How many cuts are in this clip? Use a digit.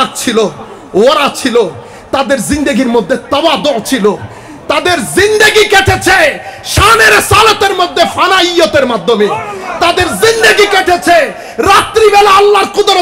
0